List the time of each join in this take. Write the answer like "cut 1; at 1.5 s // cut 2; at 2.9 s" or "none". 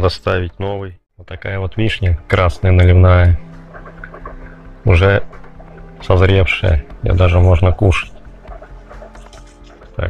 cut 1; at 1.4 s